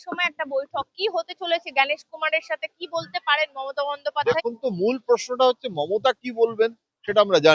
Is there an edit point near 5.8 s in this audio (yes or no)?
no